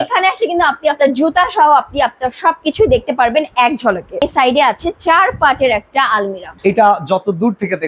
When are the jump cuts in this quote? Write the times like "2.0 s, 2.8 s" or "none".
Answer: 4.2 s, 6.5 s